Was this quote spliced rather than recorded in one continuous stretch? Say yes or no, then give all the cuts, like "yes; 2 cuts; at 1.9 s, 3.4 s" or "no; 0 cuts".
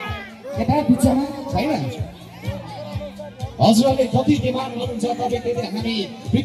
no; 0 cuts